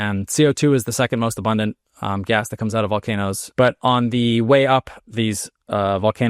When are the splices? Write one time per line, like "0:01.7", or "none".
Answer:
0:03.4